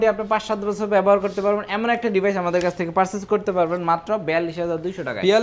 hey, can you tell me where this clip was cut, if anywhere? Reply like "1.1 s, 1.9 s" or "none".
none